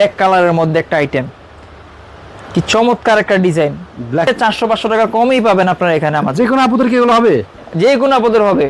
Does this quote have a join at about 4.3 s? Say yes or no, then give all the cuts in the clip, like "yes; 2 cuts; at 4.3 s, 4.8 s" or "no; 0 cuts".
yes; 1 cut; at 4.3 s